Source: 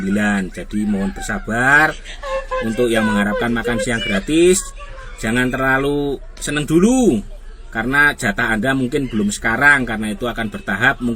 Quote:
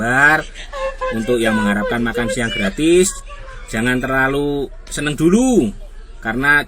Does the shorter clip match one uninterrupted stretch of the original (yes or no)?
yes